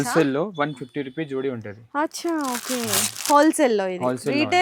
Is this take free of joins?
yes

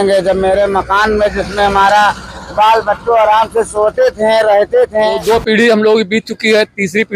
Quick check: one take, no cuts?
no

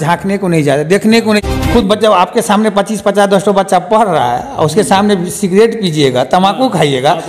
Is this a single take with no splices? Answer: no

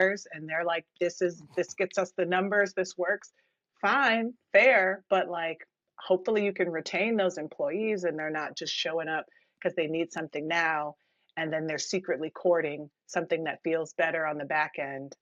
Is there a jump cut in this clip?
no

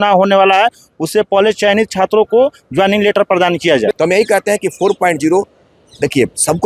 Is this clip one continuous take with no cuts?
no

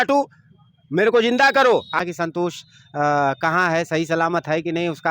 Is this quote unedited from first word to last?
no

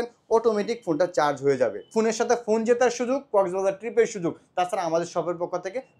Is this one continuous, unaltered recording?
no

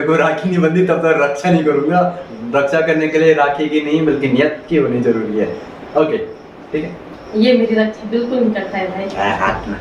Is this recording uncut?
yes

